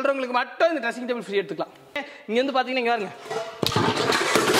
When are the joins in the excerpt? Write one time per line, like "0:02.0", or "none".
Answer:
0:02.1

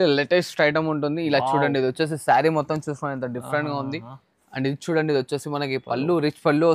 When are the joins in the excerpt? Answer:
none

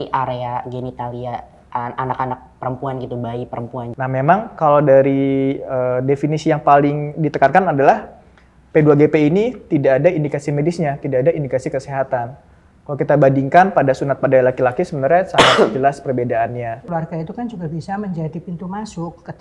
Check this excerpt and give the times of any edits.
0:03.9
0:16.8

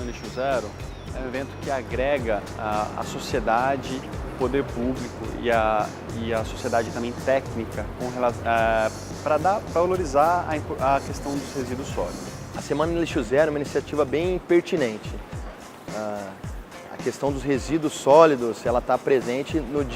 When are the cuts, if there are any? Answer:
0:12.3

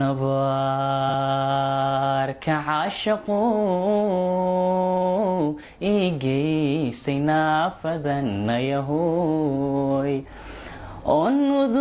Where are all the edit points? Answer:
0:01.1

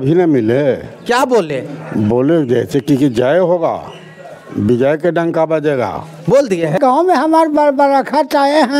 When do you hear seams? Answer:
0:06.8

